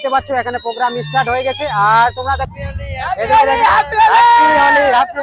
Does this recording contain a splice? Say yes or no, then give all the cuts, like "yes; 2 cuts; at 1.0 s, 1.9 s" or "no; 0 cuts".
yes; 1 cut; at 2.5 s